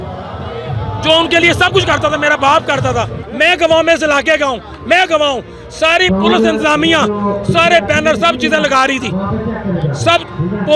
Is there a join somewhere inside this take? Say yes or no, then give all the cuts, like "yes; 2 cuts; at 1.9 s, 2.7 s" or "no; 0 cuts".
yes; 1 cut; at 3.2 s